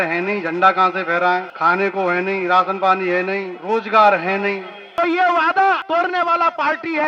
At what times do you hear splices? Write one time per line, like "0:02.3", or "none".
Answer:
0:01.5
0:03.5
0:04.8
0:05.8